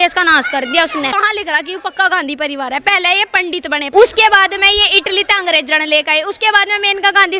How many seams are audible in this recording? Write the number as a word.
two